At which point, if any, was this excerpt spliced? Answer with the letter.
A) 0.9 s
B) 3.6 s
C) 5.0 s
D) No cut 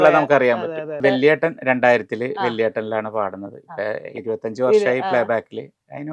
A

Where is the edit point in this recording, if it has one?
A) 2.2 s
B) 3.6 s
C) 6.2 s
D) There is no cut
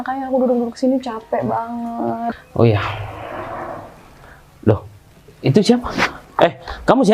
A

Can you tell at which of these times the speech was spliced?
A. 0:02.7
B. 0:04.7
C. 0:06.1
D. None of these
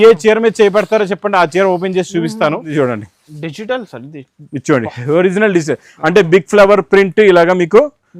A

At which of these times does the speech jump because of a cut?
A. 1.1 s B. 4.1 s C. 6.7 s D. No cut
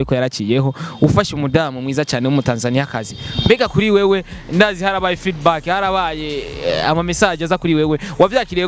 D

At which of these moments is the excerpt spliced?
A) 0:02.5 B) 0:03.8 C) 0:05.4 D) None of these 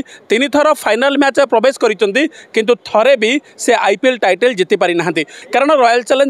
C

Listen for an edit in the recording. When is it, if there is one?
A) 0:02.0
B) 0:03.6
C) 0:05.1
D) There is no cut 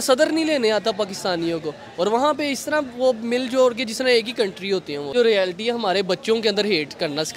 C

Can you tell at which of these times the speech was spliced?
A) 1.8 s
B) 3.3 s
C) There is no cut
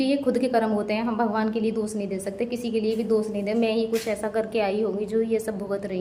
C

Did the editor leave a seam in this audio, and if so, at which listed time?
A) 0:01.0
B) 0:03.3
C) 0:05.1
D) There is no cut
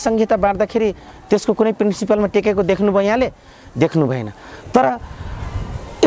D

